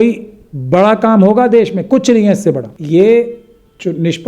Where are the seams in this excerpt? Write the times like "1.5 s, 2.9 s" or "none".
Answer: 2.7 s